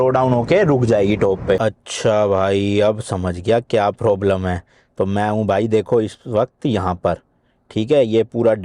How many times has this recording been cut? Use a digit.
1